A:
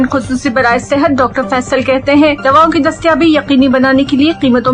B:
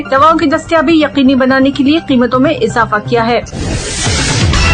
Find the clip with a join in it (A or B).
B